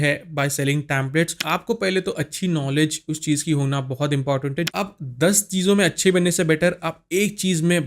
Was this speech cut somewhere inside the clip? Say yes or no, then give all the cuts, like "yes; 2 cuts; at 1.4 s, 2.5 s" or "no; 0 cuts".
yes; 2 cuts; at 1.4 s, 4.7 s